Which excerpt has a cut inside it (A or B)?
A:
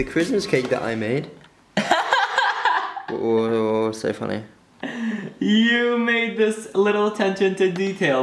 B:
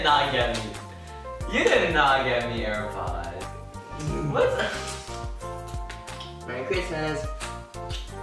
B